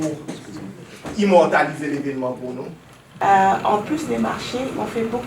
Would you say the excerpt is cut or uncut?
cut